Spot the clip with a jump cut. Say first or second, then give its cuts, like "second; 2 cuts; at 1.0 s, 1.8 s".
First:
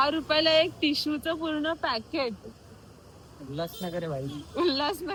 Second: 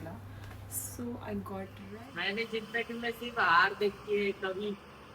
second; 1 cut; at 1.9 s